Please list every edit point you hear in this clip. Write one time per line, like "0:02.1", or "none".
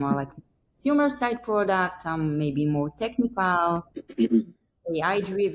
none